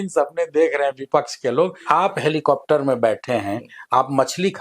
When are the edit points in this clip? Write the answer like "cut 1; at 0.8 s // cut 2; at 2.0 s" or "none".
cut 1; at 1.8 s